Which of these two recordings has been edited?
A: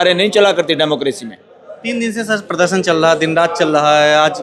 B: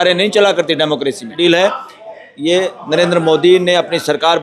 B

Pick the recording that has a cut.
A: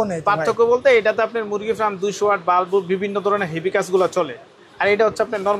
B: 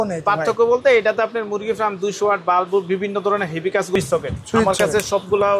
B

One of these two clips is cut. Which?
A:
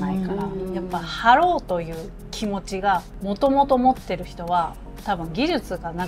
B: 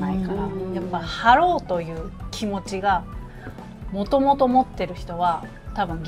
A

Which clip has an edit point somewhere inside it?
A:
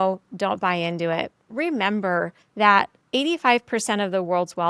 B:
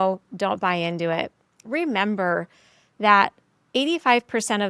A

